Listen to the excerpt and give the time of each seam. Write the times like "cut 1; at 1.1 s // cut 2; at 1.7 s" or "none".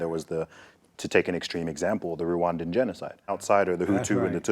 cut 1; at 3.4 s